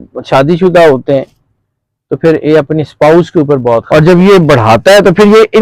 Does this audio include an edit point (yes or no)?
yes